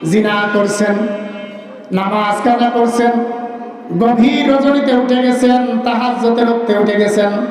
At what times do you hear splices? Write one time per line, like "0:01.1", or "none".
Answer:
none